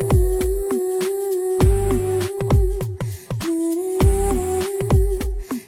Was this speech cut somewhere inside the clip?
no; 0 cuts

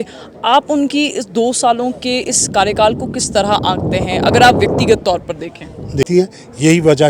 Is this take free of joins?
no; 1 cut; at 6.1 s

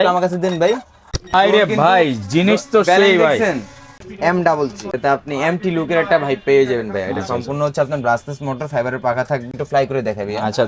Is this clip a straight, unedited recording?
no; 2 cuts; at 3.9 s, 9.5 s

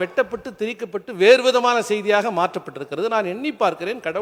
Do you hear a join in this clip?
no; 0 cuts

